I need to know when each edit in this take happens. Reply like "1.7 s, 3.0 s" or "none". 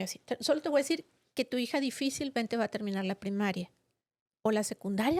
none